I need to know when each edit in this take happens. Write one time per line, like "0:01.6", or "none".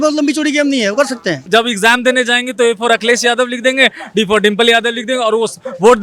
0:01.4